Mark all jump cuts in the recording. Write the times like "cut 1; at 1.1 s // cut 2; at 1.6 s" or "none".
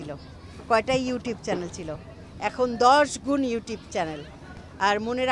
none